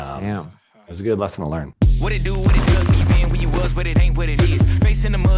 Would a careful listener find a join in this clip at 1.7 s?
yes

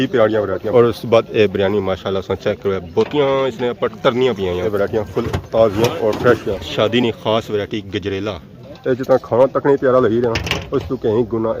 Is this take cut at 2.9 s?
no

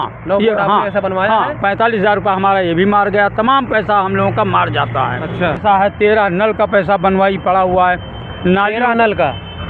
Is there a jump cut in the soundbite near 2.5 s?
no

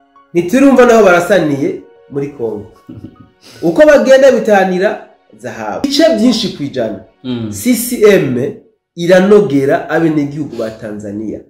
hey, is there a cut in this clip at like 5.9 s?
yes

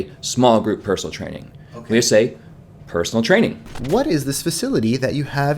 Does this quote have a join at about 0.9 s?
no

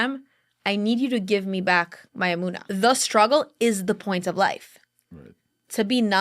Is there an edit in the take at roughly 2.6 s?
yes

